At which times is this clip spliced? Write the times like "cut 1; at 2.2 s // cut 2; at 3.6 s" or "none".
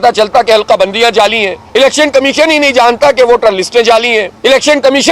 cut 1; at 1.5 s // cut 2; at 4.3 s